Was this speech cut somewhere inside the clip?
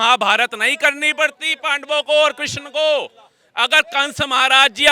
no; 0 cuts

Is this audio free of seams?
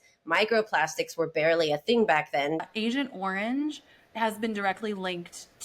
no; 1 cut; at 2.7 s

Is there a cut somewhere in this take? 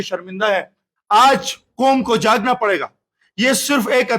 yes; 1 cut; at 0.9 s

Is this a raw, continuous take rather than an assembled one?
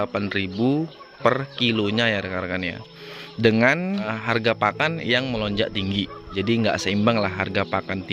no; 2 cuts; at 4.1 s, 6.3 s

